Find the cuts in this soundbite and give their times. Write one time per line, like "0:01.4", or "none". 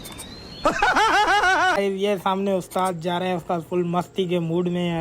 0:01.8